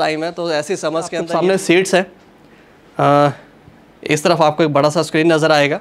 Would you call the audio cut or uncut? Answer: cut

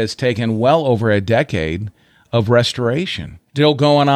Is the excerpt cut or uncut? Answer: uncut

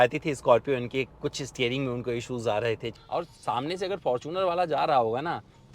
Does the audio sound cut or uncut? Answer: cut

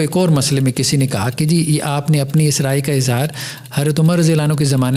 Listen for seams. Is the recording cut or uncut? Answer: uncut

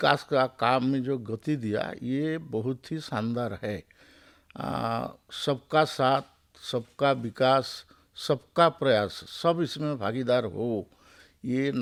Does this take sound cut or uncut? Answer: uncut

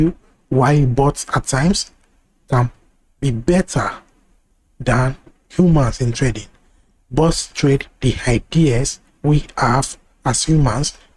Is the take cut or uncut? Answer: uncut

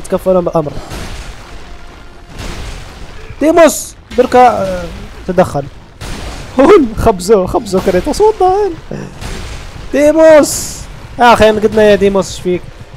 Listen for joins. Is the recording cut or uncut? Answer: uncut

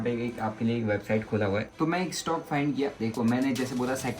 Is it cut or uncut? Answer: cut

